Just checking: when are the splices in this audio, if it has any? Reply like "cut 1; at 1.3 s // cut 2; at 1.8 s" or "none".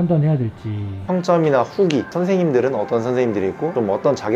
cut 1; at 1.0 s